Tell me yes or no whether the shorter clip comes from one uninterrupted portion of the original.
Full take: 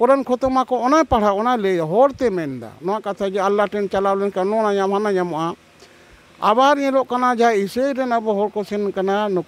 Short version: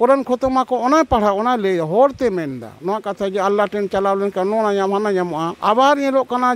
no